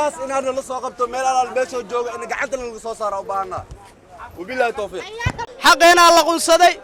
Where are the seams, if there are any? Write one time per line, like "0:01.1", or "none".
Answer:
0:05.3